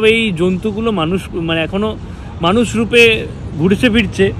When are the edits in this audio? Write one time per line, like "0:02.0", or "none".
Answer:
none